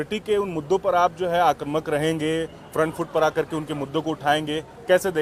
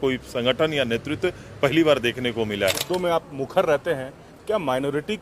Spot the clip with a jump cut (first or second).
second